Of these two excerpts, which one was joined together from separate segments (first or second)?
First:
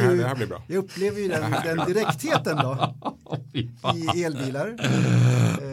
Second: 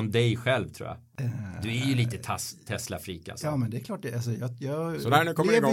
second